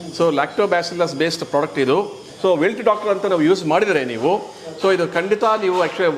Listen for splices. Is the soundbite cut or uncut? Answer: cut